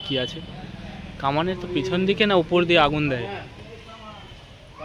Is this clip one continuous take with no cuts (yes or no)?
yes